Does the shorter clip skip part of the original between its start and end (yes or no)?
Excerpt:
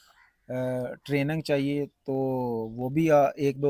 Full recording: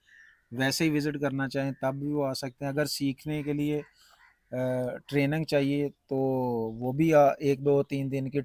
no